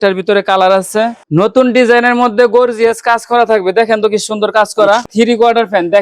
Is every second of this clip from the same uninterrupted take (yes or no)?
no